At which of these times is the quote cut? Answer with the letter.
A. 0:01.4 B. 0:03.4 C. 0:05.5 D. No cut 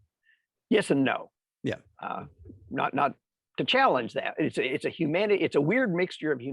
D